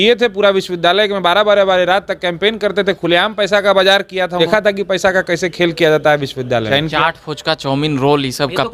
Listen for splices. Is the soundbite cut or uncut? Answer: cut